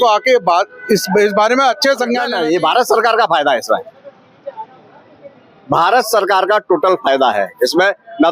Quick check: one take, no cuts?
no; 1 cut; at 2.3 s

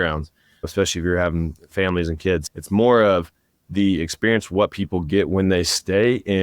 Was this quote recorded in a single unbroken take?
yes; 0 cuts

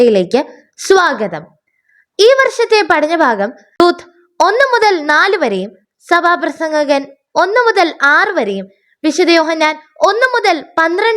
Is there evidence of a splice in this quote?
yes; 1 cut; at 3.8 s

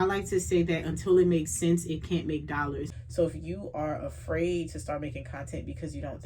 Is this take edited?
yes; 1 cut; at 2.9 s

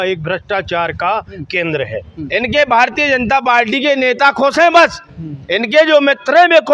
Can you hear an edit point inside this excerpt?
yes; 1 cut; at 2.1 s

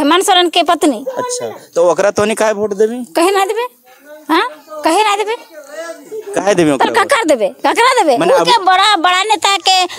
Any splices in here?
no; 0 cuts

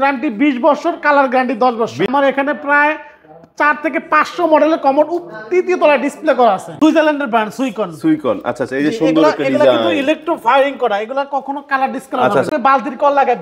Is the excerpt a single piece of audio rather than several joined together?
no; 3 cuts; at 2.1 s, 6.7 s, 12.5 s

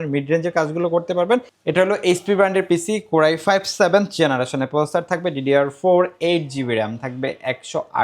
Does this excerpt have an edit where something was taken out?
yes; 1 cut; at 1.5 s

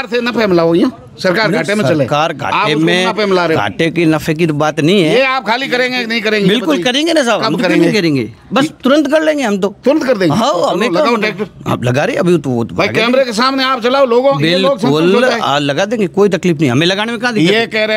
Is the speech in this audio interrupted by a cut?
no; 0 cuts

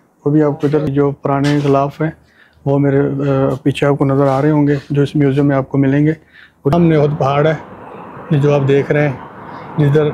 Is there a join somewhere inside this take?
yes; 2 cuts; at 0.9 s, 6.7 s

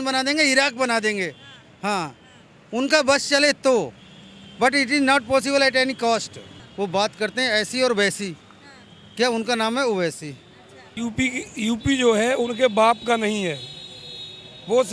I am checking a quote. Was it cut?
yes; 2 cuts; at 6.6 s, 10.8 s

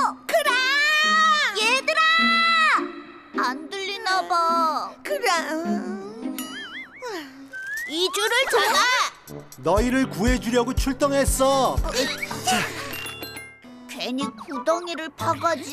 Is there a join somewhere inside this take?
yes; 2 cuts; at 11.8 s, 13.6 s

